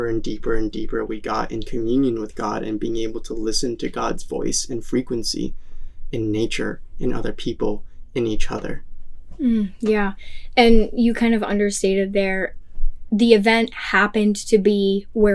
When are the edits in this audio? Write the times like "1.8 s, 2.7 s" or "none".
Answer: none